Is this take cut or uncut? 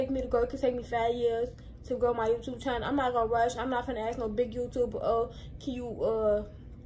uncut